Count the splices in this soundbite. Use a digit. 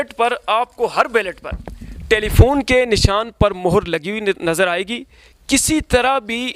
0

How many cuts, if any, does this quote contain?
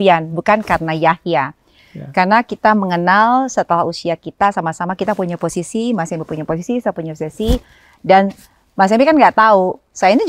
0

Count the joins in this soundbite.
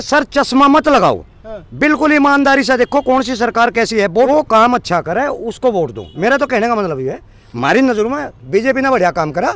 1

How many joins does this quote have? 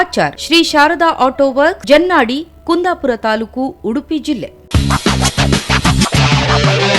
1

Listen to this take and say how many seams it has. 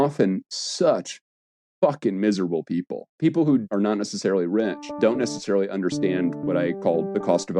4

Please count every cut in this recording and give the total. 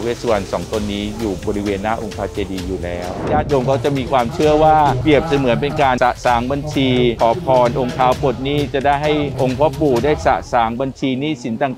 4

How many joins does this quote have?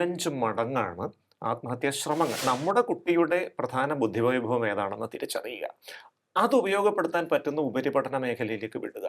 1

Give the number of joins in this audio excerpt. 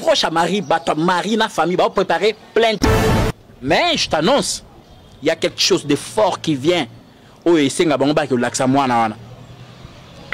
1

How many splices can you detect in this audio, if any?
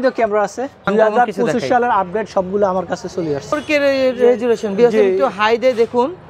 2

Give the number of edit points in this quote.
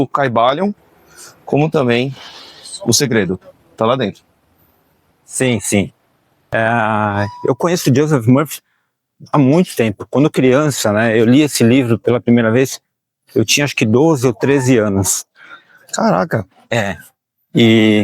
1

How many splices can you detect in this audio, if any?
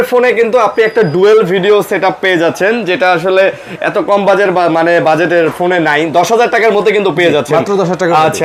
0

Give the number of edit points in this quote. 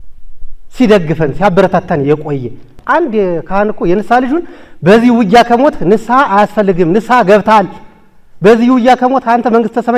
1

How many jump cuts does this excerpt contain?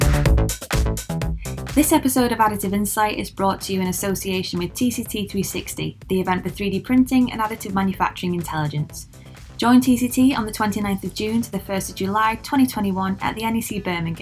1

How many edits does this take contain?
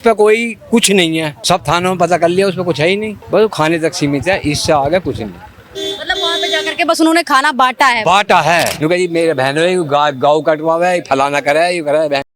3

